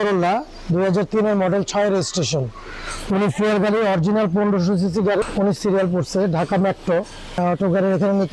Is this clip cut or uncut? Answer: cut